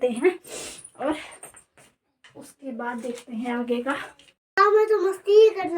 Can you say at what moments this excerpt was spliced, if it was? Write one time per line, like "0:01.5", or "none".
0:04.6